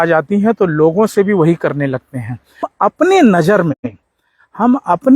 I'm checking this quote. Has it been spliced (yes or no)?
yes